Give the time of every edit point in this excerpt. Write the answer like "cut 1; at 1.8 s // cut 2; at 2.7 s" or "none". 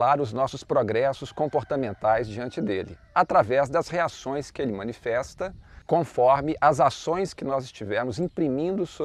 none